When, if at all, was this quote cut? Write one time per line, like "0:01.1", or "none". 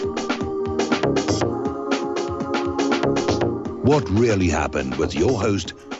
0:03.8